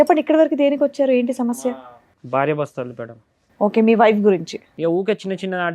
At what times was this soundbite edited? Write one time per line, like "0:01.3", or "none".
0:04.6